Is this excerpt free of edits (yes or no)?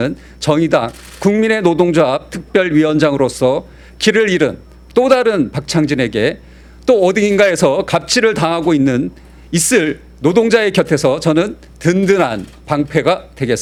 yes